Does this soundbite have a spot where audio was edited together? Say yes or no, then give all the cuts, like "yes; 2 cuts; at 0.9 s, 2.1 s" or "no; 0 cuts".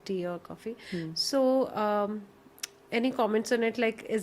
no; 0 cuts